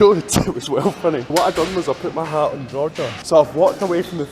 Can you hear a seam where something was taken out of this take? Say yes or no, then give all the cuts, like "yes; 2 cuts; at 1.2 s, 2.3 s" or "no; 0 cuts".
yes; 2 cuts; at 1.3 s, 3.2 s